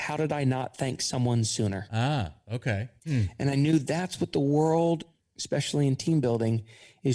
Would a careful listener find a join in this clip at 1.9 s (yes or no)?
yes